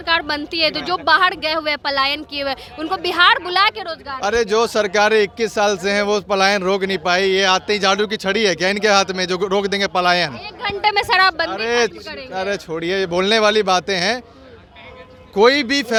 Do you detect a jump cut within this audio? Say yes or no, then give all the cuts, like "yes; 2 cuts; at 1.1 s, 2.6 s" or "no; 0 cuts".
no; 0 cuts